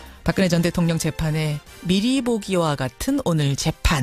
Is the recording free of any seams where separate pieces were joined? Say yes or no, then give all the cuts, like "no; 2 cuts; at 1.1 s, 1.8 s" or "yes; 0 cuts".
no; 1 cut; at 2.0 s